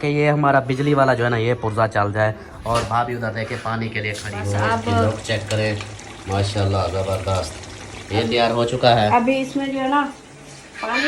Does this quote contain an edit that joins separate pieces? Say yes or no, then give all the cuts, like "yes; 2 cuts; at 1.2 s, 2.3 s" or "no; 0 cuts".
yes; 1 cut; at 4.3 s